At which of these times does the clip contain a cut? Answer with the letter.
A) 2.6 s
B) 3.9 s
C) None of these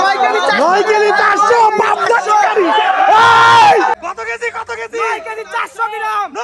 B